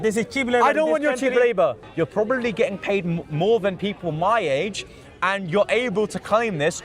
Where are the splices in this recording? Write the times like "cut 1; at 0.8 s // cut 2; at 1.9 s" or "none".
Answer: cut 1; at 1.8 s